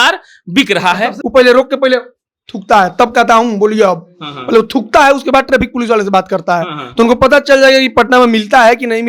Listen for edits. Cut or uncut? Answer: cut